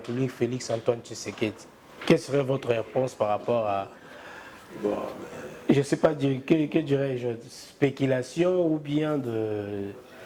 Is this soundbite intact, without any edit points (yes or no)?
yes